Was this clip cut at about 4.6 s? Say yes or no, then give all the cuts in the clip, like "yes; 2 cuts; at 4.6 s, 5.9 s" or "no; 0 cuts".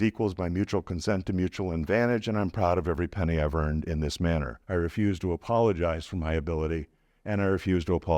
yes; 1 cut; at 4.6 s